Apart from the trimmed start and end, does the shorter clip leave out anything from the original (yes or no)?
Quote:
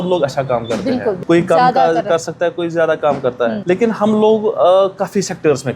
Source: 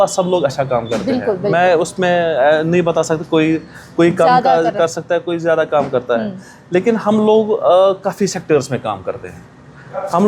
yes